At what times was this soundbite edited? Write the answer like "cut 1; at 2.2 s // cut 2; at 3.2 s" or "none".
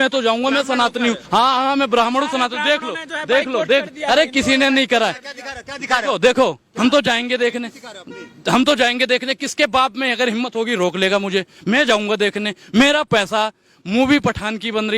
cut 1; at 1.2 s